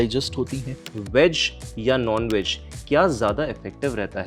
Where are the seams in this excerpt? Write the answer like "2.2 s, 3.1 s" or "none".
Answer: 0.9 s